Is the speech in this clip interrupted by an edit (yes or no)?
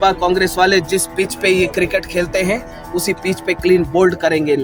no